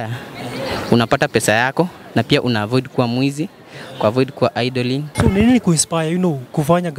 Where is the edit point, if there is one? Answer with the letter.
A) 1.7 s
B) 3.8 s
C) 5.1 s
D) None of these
C